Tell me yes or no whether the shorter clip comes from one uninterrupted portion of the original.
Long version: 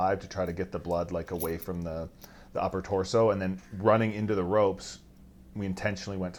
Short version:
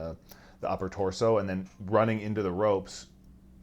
yes